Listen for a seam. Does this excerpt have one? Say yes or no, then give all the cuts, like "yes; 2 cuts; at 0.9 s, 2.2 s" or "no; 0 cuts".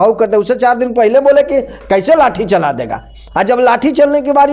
no; 0 cuts